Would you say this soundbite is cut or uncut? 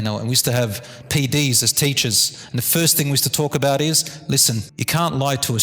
cut